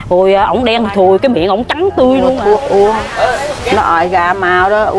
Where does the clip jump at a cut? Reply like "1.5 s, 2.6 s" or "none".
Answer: 2.4 s